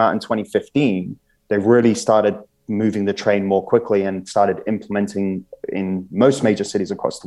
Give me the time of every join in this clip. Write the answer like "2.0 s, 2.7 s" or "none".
none